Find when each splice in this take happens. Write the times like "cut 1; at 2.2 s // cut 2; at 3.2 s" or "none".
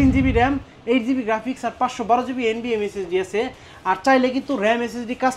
none